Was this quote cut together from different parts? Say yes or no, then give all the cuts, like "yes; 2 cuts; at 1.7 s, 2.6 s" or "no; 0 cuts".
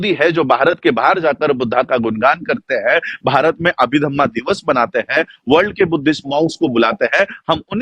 no; 0 cuts